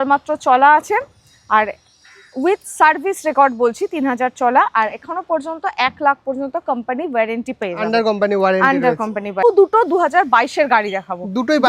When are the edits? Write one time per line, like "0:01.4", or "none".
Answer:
0:09.4